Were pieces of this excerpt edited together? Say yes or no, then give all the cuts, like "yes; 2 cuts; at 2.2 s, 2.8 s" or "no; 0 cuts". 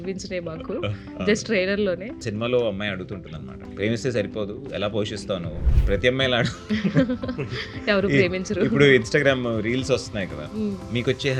yes; 3 cuts; at 2.2 s, 3.6 s, 5.6 s